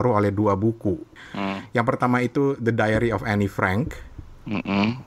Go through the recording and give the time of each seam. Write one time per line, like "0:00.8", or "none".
0:01.2